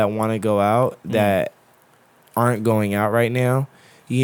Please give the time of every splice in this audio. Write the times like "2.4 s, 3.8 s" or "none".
none